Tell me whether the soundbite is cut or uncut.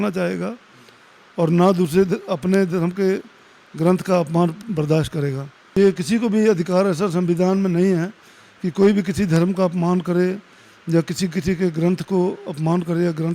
cut